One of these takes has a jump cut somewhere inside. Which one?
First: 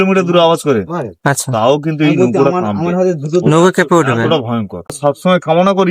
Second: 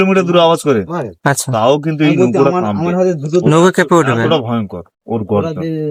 first; 1 cut; at 5.0 s

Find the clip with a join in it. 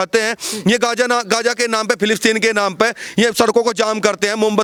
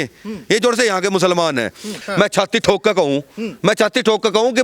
second; 1 cut; at 2.0 s

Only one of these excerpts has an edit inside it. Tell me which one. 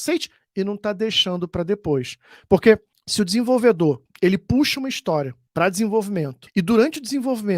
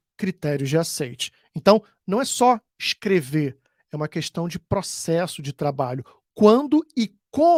first; 4 cuts; at 3.0 s, 4.1 s, 5.4 s, 6.4 s

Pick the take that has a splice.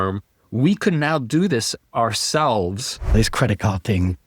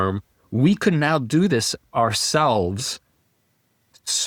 first; 1 cut; at 3.1 s

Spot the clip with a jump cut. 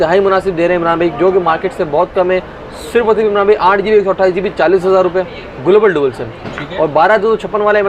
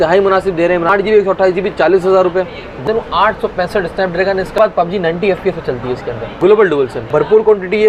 second; 5 cuts; at 0.9 s, 2.8 s, 4.6 s, 6.2 s, 7.0 s

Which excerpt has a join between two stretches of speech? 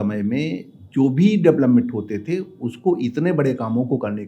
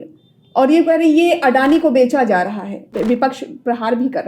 second; 1 cut; at 2.9 s

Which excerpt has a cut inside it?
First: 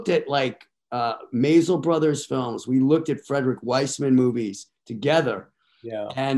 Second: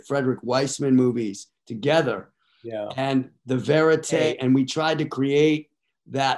second; 1 cut; at 4.2 s

